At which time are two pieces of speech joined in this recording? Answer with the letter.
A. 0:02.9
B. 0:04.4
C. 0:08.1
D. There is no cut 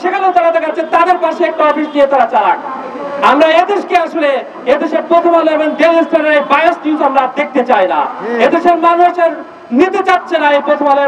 D